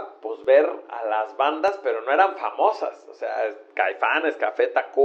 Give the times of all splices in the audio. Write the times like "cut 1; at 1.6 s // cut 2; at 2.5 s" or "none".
none